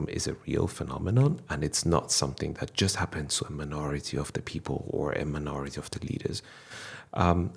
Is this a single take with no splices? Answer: yes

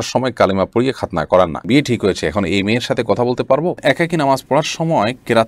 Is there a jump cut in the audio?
yes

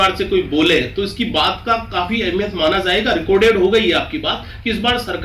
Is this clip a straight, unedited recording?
yes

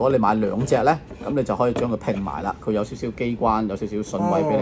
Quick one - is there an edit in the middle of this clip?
no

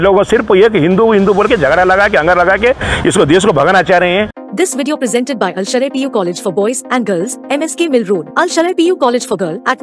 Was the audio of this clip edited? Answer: yes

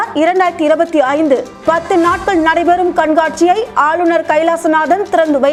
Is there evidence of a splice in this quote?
no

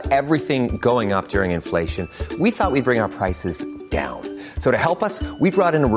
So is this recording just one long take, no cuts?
yes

